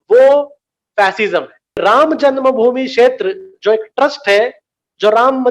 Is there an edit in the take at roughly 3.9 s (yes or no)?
no